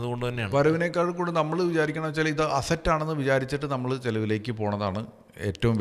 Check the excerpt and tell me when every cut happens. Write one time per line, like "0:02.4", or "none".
none